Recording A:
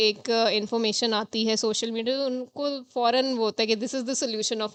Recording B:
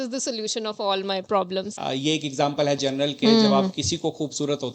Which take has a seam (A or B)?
B